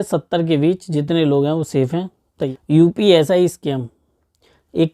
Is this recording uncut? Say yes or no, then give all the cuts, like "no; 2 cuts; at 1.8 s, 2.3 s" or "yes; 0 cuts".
no; 1 cut; at 2.5 s